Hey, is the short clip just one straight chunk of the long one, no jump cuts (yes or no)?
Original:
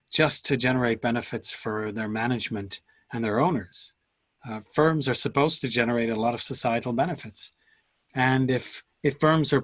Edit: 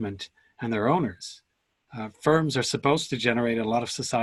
yes